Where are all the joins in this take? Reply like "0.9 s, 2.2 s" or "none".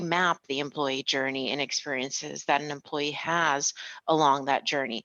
none